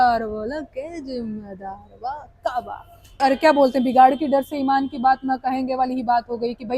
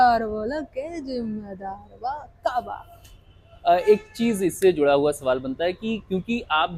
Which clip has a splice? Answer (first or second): first